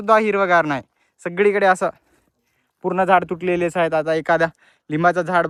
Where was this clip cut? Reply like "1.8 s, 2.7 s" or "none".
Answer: none